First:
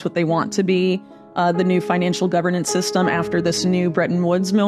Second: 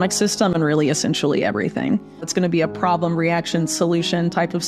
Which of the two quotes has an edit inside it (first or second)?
second